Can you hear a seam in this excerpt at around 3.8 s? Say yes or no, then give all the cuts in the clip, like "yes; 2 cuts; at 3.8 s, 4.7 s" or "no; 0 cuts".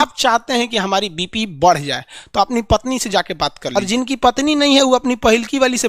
yes; 1 cut; at 3.8 s